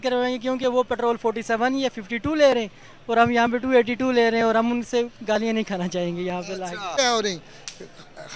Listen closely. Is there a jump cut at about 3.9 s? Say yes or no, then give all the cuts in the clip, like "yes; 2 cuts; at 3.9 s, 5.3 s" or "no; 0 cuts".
no; 1 cut; at 6.9 s